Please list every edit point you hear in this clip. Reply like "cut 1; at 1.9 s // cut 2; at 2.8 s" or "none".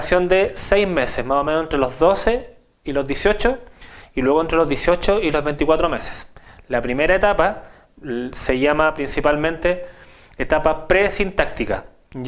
cut 1; at 9.2 s